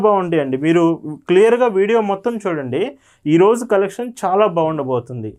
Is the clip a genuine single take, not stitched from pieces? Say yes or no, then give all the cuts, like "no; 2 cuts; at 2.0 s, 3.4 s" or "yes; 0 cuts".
yes; 0 cuts